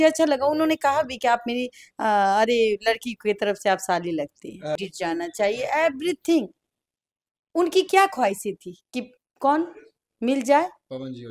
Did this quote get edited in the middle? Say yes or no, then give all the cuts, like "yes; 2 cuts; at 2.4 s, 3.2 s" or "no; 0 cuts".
yes; 1 cut; at 4.8 s